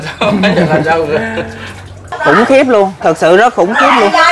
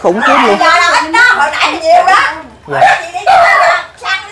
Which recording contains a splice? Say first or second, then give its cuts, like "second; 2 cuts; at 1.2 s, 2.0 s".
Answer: first; 1 cut; at 2.1 s